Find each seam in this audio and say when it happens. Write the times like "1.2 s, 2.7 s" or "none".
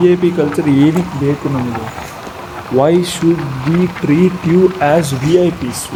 none